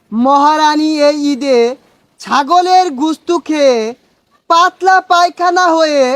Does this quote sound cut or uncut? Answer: uncut